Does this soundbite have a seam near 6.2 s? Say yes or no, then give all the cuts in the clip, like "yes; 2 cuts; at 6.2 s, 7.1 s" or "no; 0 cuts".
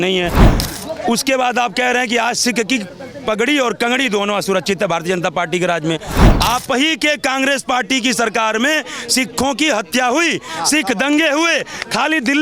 yes; 1 cut; at 6.2 s